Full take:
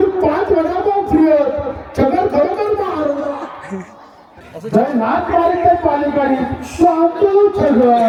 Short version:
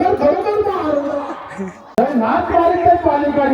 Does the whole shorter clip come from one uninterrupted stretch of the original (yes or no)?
no